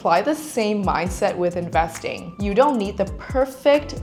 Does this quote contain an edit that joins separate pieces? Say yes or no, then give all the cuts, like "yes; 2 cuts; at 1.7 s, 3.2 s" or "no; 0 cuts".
no; 0 cuts